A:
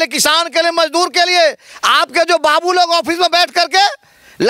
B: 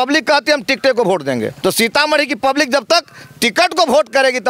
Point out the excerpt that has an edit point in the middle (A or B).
B